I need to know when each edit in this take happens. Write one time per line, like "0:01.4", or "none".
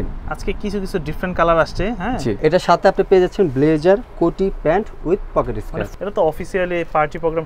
0:02.4
0:05.7